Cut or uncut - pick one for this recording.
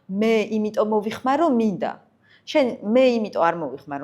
uncut